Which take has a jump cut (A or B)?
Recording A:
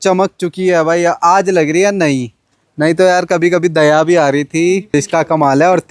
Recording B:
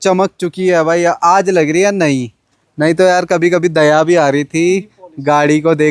A